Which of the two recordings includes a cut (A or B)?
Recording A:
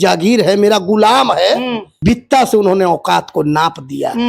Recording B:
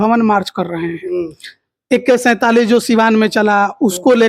A